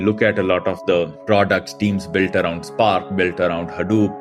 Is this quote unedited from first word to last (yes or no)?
yes